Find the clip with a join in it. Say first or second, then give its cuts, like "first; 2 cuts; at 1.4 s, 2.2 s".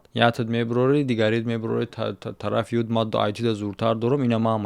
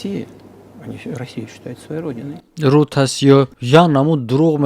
second; 1 cut; at 3.6 s